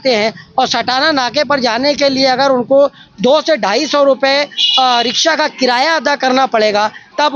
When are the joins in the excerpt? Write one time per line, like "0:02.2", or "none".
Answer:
none